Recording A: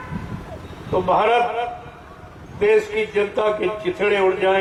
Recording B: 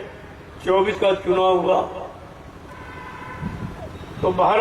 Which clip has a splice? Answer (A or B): B